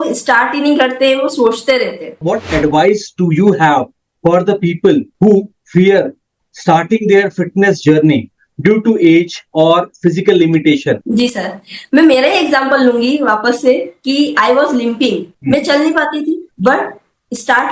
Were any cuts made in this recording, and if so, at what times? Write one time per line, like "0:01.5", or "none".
0:02.2